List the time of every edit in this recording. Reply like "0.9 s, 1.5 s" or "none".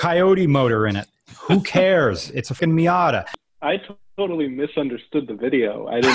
2.5 s, 3.3 s